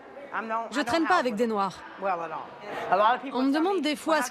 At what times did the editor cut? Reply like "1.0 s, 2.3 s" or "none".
2.7 s